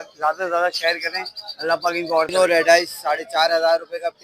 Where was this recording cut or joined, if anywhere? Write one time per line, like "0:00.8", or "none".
0:02.3